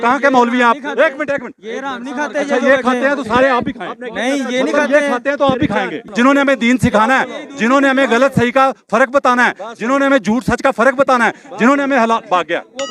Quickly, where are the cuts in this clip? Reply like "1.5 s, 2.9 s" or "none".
6.0 s